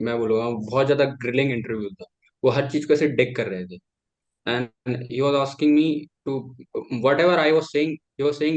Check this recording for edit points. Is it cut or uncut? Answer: uncut